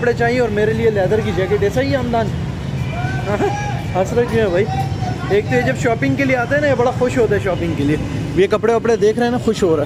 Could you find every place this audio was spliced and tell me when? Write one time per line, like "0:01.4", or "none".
none